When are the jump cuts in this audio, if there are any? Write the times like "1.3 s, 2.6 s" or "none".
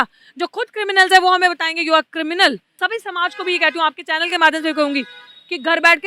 2.7 s